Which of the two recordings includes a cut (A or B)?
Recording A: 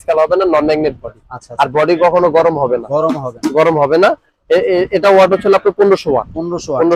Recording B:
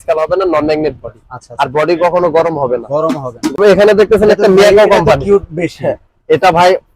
B